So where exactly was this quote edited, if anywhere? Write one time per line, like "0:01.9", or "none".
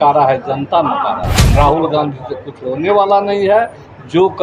0:01.4